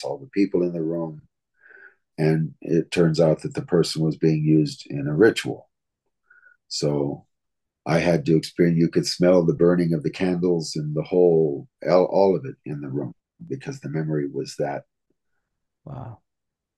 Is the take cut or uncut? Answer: uncut